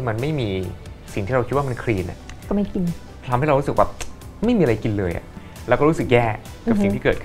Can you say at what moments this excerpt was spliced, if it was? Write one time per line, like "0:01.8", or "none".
0:05.3